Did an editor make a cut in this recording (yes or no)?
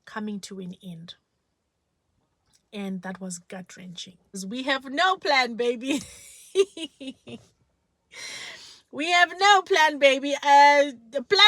yes